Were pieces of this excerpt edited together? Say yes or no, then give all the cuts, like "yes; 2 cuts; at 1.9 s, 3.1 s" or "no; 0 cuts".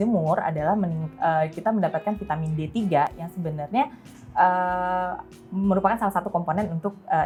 no; 0 cuts